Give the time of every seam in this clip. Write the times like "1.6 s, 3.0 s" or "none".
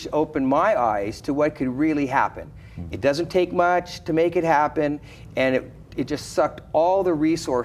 none